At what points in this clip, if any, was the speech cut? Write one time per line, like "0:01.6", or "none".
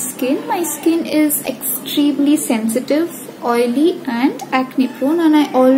none